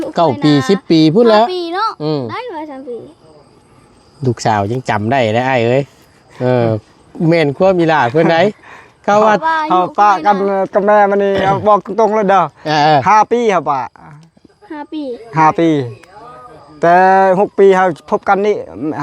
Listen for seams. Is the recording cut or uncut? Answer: uncut